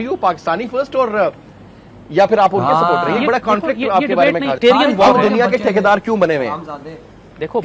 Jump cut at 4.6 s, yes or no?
yes